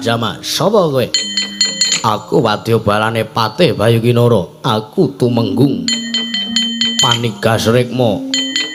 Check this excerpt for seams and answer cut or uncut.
uncut